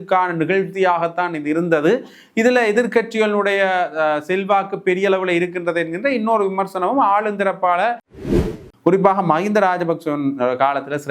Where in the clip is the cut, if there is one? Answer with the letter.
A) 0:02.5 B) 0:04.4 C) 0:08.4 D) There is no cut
C